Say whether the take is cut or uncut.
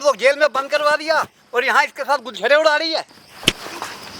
cut